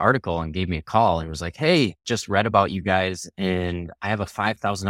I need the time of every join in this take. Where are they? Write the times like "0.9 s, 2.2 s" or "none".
2.1 s

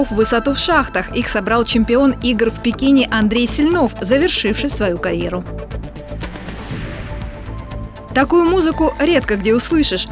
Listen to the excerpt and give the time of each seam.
none

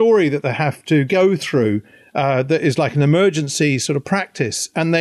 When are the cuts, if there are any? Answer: none

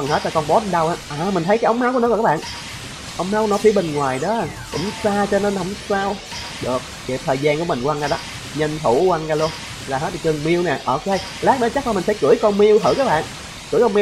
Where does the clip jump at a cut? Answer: 9.7 s

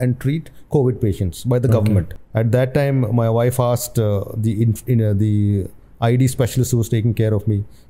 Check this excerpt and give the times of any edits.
2.2 s

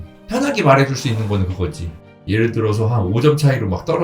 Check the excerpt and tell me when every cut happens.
2.1 s

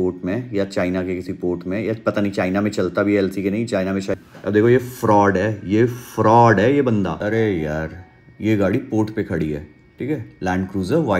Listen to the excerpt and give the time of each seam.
4.2 s, 7.2 s

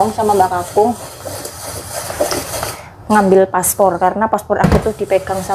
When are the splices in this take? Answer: none

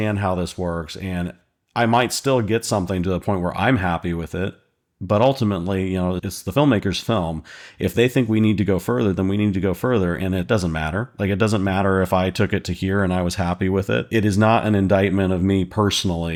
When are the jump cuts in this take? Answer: none

